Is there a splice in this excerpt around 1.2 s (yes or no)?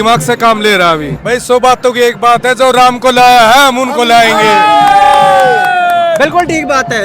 yes